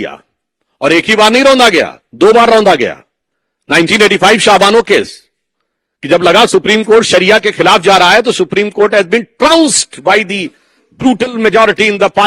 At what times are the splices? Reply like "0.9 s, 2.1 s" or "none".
none

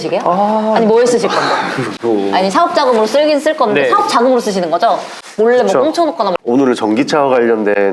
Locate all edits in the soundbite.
6.3 s

